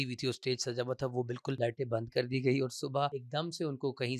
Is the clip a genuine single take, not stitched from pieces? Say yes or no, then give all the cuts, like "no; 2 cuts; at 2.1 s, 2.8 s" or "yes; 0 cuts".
no; 2 cuts; at 1.6 s, 3.2 s